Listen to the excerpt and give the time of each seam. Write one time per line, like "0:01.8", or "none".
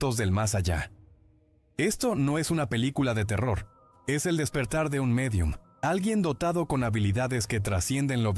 none